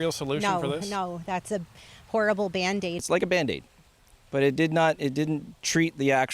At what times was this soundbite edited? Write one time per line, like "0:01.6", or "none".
0:03.0